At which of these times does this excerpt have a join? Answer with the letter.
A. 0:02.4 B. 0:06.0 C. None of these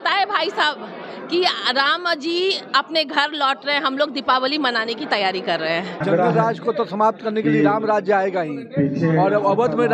B